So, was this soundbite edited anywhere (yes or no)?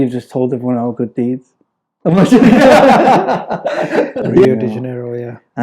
yes